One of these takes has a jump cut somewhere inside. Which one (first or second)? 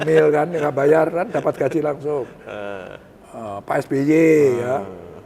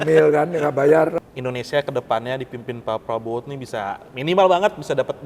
second